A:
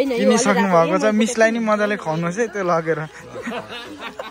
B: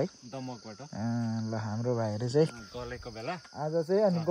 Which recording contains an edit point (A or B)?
A